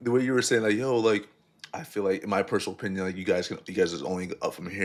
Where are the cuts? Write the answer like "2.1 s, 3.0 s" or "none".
none